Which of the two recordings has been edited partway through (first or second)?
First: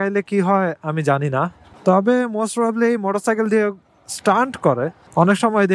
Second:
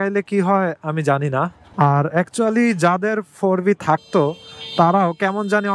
second